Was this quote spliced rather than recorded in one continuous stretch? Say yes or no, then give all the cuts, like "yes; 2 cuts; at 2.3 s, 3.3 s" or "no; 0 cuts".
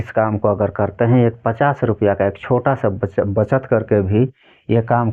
no; 0 cuts